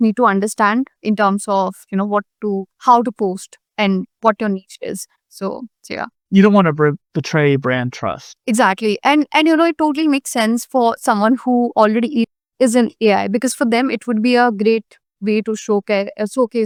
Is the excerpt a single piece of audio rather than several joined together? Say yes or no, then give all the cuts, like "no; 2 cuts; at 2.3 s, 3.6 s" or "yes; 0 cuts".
yes; 0 cuts